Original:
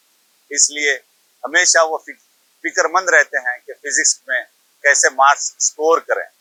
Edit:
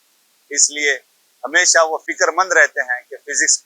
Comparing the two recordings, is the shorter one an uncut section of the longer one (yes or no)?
no